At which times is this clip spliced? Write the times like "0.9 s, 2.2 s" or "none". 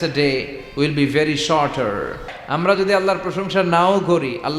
2.4 s